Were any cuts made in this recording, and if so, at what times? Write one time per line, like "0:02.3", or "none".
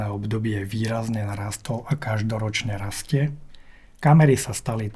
none